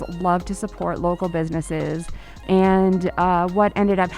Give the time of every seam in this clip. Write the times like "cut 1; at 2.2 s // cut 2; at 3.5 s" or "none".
cut 1; at 2.4 s